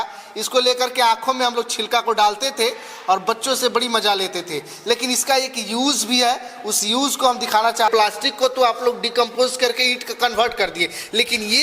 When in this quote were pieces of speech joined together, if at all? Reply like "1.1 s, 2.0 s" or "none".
7.9 s